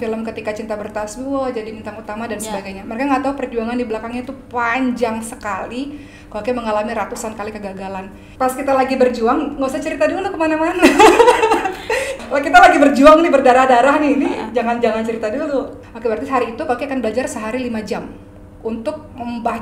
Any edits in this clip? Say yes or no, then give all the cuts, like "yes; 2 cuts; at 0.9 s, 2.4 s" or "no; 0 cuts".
yes; 3 cuts; at 8.2 s, 12.1 s, 15.8 s